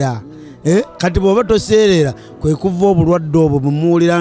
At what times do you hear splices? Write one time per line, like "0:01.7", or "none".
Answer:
none